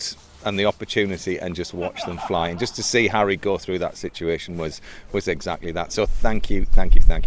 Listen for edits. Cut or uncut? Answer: cut